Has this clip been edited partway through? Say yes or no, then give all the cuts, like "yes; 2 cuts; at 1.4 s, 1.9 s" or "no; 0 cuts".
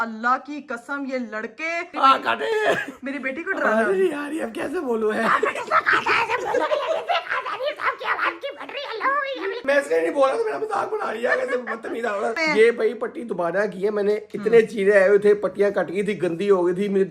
yes; 3 cuts; at 1.9 s, 9.6 s, 12.4 s